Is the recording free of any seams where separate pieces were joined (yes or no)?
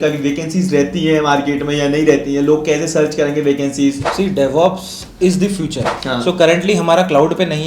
no